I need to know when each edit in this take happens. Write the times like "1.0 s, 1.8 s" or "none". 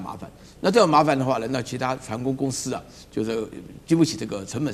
none